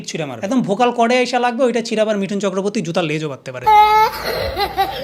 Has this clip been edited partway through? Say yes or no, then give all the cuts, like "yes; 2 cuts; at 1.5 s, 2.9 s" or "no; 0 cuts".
yes; 1 cut; at 3.5 s